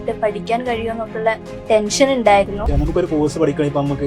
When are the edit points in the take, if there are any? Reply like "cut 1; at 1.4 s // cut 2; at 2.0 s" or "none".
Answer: cut 1; at 2.7 s

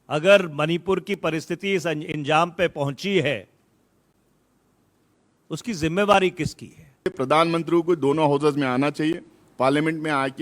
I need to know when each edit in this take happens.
cut 1; at 7.1 s

